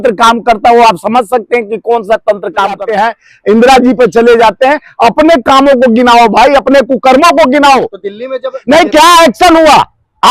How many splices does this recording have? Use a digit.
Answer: 2